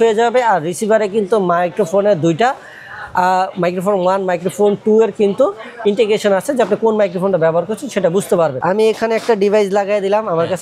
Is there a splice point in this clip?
yes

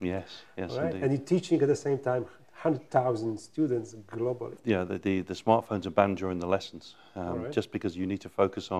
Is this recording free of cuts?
no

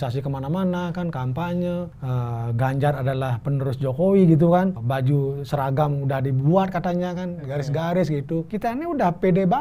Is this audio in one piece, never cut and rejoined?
no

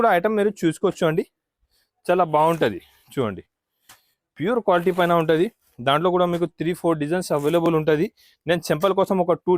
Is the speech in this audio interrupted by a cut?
no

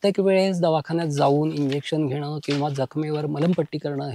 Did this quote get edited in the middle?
no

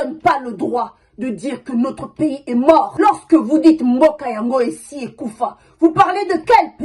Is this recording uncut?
yes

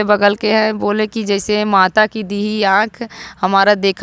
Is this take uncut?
yes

